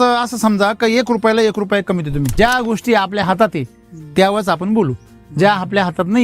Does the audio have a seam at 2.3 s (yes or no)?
yes